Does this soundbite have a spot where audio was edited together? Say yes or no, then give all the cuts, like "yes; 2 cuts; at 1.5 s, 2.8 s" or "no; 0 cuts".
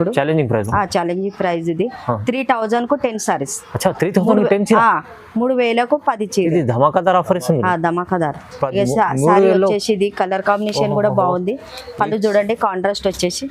no; 0 cuts